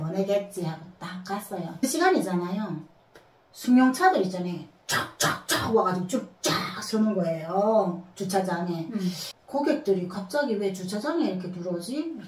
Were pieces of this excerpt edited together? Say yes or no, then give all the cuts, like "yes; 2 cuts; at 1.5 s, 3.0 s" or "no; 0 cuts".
yes; 2 cuts; at 1.8 s, 9.3 s